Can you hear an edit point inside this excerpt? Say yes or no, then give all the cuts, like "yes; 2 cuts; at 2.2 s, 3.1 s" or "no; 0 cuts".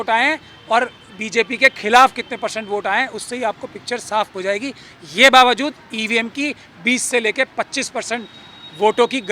no; 0 cuts